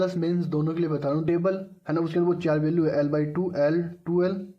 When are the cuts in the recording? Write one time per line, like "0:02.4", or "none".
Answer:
0:01.2